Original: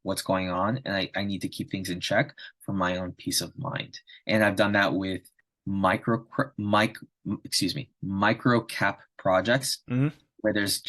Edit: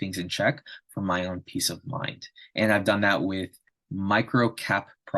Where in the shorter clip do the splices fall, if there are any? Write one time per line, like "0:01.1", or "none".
0:03.8